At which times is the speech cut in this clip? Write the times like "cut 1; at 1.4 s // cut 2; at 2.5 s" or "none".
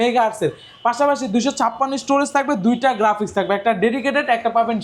none